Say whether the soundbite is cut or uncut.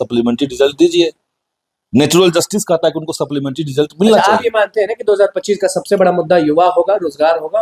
uncut